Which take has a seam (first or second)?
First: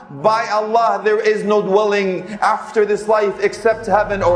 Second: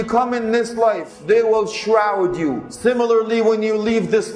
second